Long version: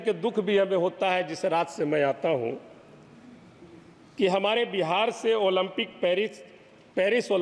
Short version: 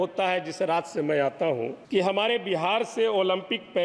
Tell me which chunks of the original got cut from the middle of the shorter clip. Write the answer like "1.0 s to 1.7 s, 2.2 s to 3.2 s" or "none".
2.6 s to 4.1 s